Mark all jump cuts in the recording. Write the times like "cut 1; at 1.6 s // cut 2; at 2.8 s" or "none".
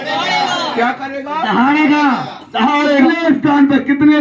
cut 1; at 3.1 s